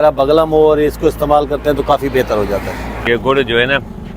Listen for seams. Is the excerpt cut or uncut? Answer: cut